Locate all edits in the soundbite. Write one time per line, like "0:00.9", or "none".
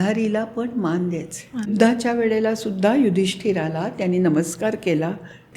0:01.7